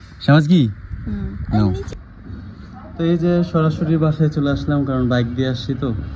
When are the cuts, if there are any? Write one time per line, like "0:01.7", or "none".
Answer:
0:01.9

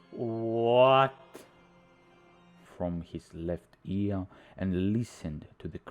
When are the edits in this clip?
0:02.7

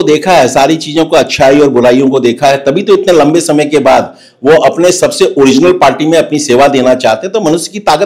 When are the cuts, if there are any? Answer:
none

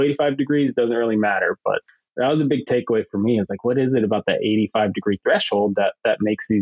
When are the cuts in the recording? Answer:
0:01.8

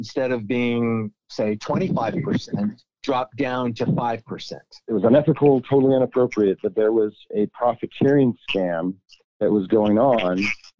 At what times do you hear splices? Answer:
0:02.9
0:04.9

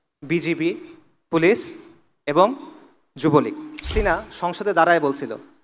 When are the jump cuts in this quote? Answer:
0:03.9

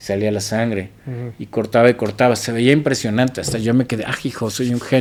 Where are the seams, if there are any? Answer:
none

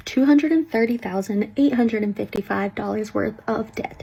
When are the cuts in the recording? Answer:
none

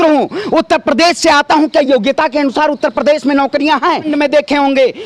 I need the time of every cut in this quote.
0:04.1

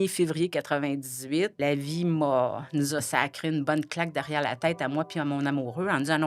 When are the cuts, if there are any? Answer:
0:01.6

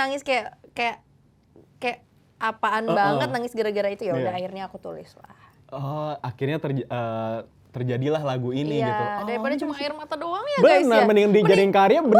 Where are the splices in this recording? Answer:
none

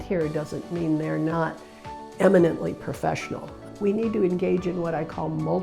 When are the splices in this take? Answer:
0:03.7

